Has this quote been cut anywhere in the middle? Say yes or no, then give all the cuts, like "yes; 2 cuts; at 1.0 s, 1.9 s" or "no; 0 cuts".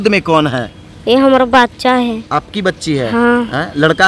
no; 0 cuts